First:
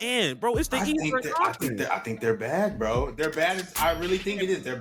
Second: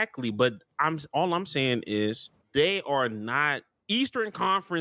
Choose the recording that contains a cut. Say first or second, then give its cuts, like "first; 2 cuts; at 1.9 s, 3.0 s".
second; 2 cuts; at 2.3 s, 3.7 s